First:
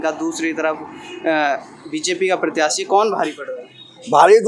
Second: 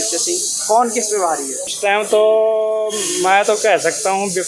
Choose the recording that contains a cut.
second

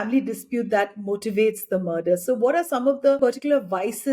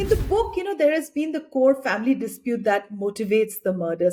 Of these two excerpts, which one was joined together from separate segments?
first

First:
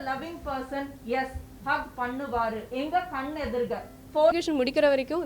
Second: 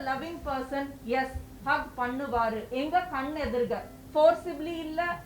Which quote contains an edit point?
first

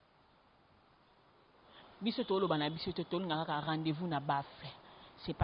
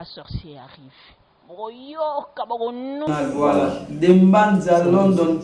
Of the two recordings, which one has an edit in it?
second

